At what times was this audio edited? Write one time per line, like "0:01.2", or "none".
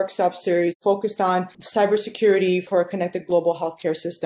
0:01.6